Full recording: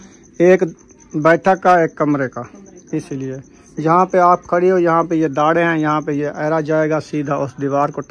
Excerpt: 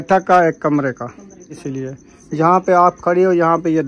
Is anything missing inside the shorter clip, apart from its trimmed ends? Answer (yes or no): yes